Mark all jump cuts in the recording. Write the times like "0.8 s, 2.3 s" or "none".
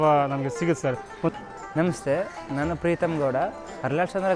1.3 s